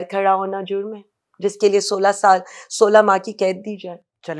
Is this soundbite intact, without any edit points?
yes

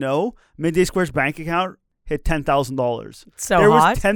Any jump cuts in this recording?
yes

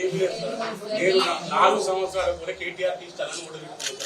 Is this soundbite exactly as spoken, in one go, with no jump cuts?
yes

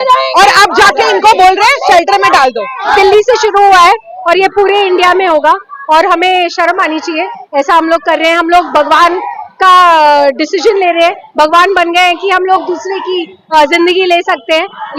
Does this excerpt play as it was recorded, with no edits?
no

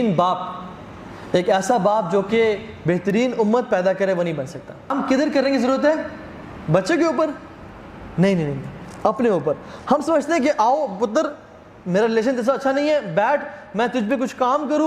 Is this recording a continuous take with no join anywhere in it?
no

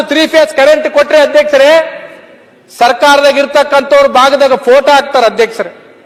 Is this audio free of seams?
yes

